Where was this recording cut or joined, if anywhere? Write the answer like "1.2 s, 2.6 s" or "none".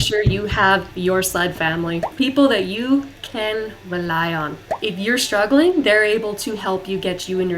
2.0 s, 4.6 s

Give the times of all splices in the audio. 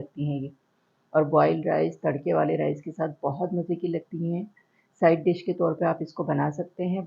4.7 s

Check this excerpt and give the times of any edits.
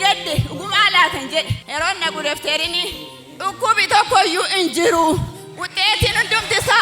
1.6 s

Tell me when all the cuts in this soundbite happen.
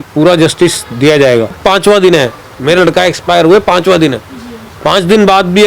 1.5 s

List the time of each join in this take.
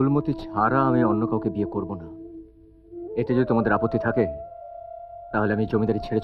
none

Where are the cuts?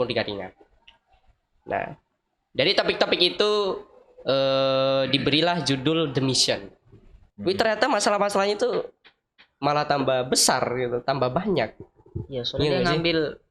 7.1 s

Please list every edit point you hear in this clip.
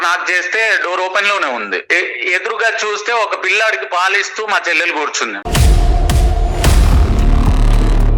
none

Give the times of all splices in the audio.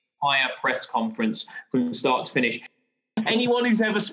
2.9 s

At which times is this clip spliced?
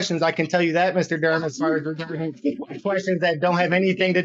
none

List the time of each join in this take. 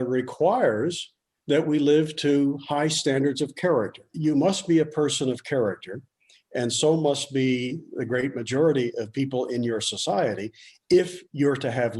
4.1 s

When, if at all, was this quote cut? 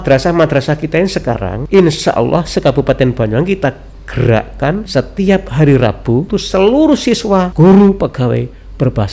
1.5 s, 4.9 s, 6.3 s, 7.5 s

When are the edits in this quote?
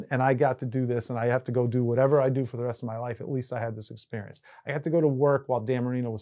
none

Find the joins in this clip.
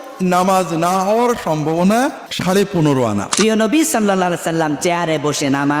2.3 s, 3.3 s

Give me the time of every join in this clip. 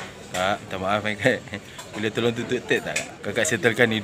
3.1 s

